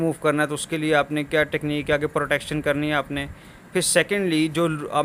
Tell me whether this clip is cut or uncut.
uncut